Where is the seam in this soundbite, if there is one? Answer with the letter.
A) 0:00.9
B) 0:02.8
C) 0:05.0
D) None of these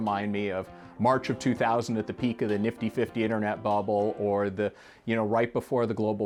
D